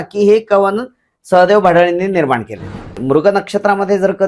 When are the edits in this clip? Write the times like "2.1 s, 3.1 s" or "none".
2.9 s